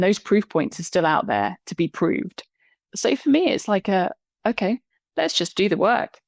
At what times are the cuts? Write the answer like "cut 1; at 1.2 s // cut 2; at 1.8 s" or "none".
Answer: cut 1; at 4.9 s